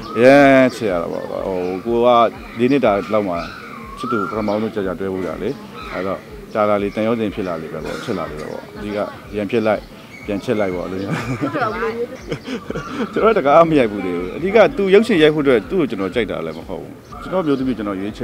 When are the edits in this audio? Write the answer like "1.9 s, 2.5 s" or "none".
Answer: 12.2 s, 17.1 s